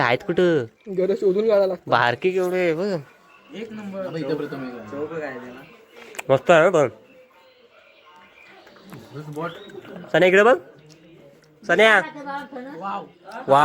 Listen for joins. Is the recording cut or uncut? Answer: uncut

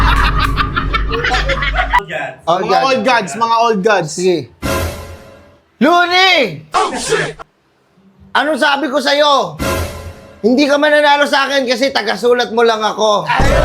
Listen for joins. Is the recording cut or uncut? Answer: cut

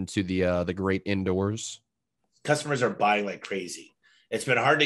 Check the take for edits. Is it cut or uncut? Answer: cut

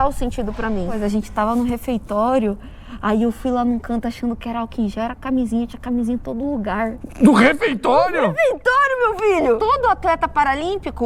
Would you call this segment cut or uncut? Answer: cut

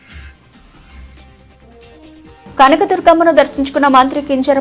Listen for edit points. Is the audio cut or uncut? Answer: cut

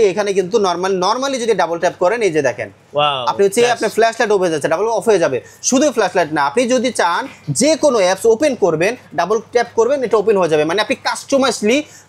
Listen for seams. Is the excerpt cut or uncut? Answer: uncut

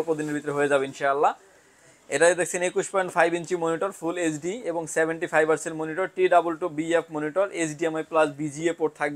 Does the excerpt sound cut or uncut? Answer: uncut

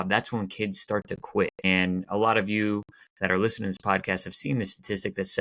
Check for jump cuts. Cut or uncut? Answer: cut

